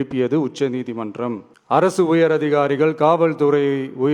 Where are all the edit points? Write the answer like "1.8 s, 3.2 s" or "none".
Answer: 1.5 s